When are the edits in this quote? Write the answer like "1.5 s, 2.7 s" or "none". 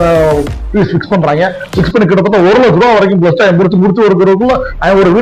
none